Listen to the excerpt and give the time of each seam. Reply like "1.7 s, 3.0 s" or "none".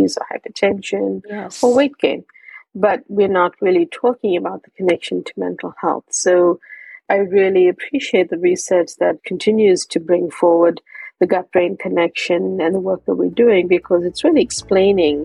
7.0 s, 9.3 s